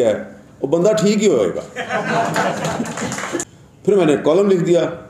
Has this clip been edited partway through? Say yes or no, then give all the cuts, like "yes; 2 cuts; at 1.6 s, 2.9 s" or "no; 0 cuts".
yes; 1 cut; at 3.4 s